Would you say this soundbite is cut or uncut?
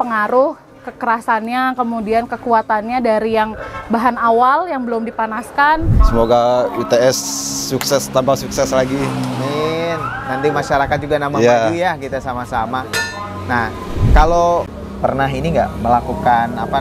cut